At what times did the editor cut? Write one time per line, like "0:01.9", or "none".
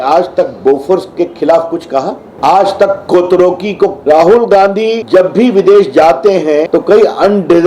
0:02.2
0:04.0
0:05.0
0:06.7